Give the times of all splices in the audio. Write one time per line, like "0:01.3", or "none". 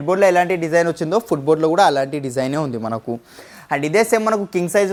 none